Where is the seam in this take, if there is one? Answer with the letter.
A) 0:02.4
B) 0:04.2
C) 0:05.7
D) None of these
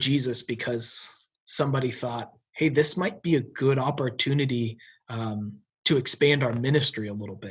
D